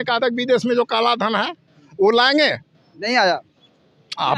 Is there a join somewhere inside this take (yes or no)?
no